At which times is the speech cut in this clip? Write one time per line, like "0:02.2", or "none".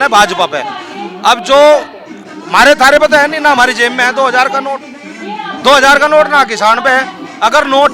none